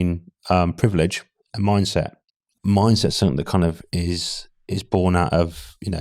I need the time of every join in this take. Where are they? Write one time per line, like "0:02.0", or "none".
0:02.5